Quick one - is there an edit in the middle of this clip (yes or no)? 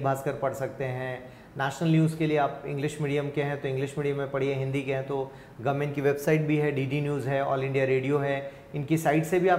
no